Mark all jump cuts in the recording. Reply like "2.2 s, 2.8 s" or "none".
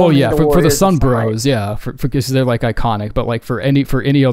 none